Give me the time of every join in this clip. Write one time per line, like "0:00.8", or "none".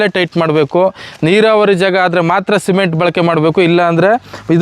none